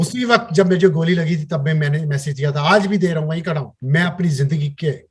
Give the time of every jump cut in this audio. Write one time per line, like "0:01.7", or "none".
0:03.7